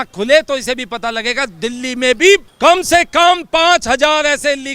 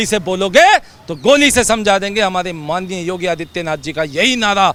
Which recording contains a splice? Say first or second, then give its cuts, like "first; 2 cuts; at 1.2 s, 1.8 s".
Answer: first; 1 cut; at 2.5 s